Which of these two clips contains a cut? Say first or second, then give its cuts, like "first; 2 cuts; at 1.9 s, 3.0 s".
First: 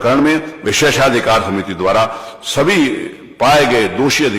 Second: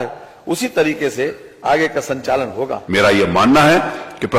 second; 1 cut; at 2.8 s